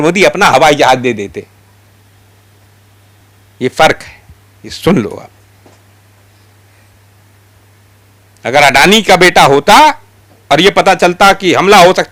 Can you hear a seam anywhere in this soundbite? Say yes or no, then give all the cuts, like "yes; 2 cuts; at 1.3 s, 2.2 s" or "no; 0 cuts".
no; 0 cuts